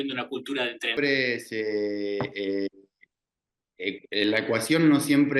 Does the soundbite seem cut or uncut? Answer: cut